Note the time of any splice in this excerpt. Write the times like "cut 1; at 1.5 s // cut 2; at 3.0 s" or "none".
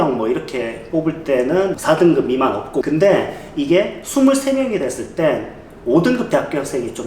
cut 1; at 1.7 s // cut 2; at 2.9 s